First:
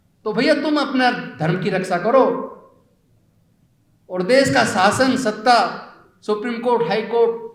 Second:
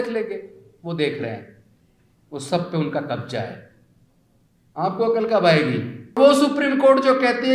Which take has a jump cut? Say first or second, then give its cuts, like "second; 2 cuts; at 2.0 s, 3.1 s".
second; 1 cut; at 6.2 s